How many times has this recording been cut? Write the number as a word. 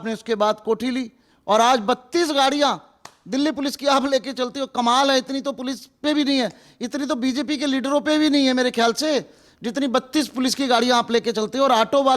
zero